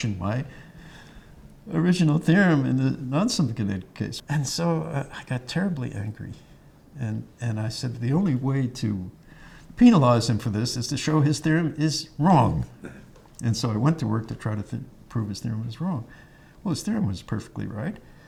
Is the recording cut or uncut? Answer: uncut